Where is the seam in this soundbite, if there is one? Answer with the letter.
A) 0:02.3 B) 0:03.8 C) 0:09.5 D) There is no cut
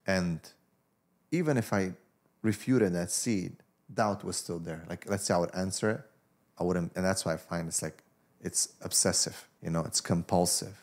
C